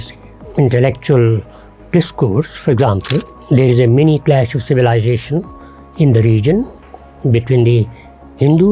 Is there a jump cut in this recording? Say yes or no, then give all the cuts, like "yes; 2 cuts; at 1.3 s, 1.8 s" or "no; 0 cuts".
no; 0 cuts